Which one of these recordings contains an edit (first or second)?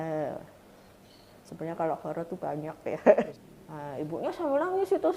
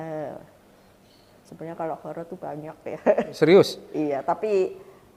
first